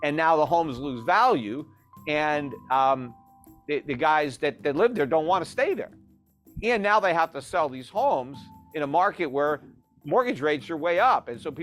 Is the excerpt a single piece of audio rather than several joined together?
yes; 0 cuts

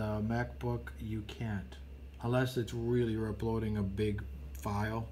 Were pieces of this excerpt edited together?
no; 0 cuts

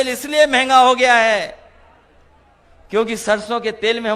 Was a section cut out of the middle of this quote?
no; 0 cuts

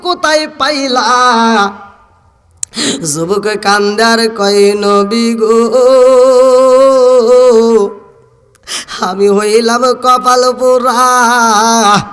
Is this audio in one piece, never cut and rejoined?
yes; 0 cuts

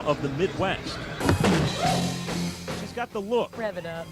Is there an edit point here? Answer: yes; 1 cut; at 1.2 s

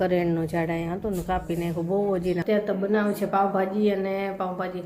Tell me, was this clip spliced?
yes; 1 cut; at 2.4 s

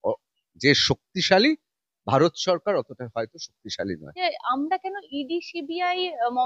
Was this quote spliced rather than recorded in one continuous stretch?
yes; 1 cut; at 4.1 s

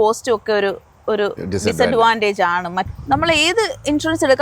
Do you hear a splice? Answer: yes; 1 cut; at 2.8 s

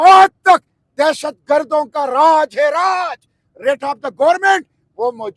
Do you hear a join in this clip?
no; 0 cuts

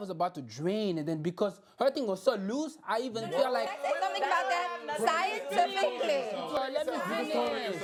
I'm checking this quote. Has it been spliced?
no; 0 cuts

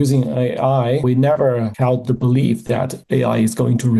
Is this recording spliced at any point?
yes; 1 cut; at 1.0 s

